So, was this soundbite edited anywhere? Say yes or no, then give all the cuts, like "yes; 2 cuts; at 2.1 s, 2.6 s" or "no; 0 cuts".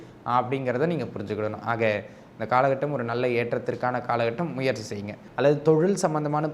yes; 1 cut; at 5.2 s